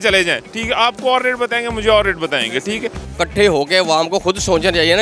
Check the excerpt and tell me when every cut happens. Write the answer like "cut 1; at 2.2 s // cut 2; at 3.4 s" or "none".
cut 1; at 3.0 s